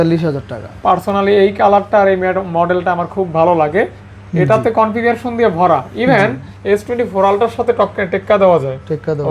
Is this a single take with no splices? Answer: yes; 0 cuts

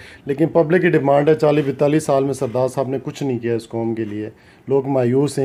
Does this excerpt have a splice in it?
no; 0 cuts

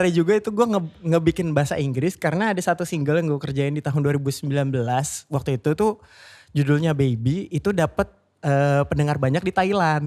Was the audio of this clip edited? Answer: no; 0 cuts

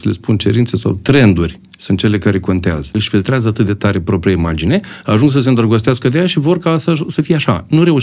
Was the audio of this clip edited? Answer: yes; 1 cut; at 2.9 s

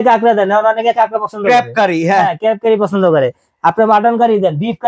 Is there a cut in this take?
no; 0 cuts

